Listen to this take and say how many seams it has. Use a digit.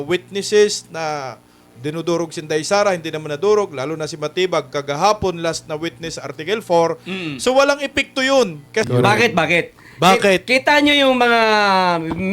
1